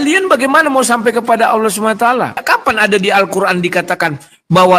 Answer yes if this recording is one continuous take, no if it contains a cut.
no